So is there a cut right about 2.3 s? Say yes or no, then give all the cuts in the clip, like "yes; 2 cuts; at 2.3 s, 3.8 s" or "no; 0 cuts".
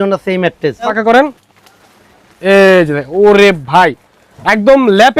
no; 1 cut; at 0.9 s